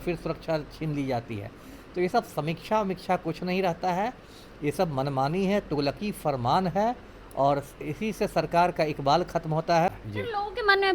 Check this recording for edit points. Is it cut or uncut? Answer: cut